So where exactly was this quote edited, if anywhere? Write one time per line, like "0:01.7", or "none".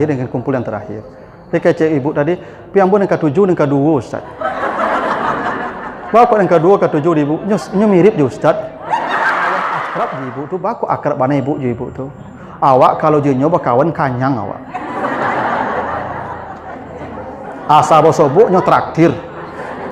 0:09.8